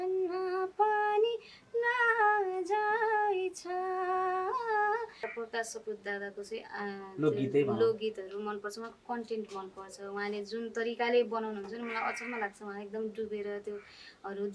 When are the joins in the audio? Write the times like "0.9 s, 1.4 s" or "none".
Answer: 5.2 s

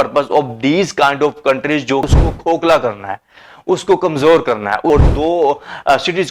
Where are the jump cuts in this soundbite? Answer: 2.1 s, 4.9 s

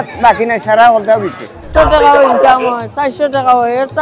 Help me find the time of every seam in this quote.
1.7 s

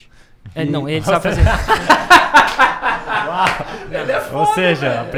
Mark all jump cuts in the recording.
none

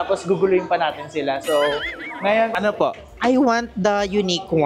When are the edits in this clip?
2.5 s

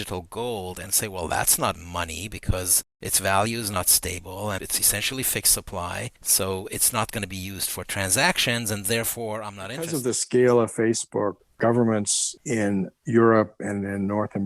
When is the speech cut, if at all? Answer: 9.9 s

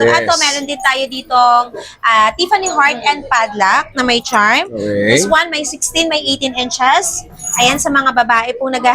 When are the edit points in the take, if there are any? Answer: none

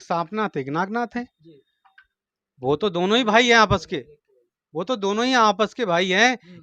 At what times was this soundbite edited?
none

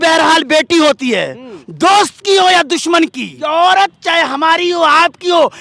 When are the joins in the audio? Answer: 3.3 s

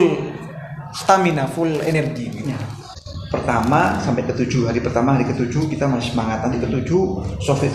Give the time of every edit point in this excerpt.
2.8 s

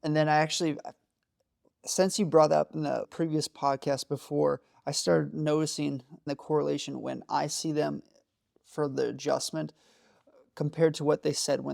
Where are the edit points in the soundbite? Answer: 3.1 s

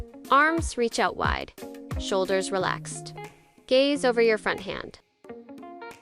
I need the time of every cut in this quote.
none

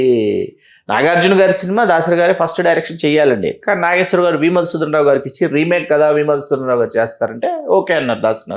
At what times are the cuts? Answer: none

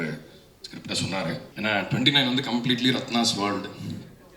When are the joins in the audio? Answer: 1.5 s

